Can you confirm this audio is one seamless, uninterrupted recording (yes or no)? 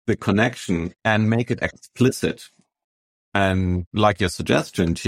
no